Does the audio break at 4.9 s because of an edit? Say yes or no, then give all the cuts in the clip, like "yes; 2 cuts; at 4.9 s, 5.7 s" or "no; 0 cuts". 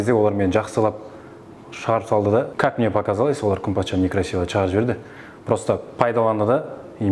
no; 1 cut; at 2.5 s